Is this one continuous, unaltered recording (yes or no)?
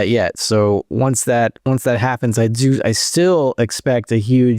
no